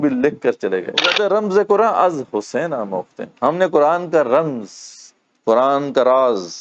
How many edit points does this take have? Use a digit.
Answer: 1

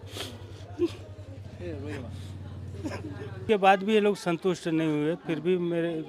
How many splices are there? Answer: 1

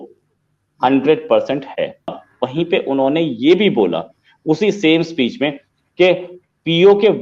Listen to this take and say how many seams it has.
1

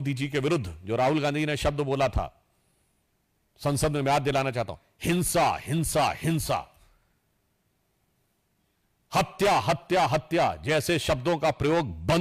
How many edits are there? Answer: 0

